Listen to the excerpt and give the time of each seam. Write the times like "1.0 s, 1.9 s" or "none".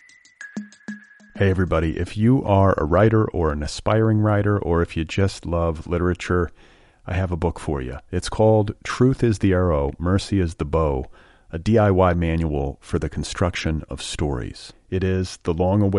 0.9 s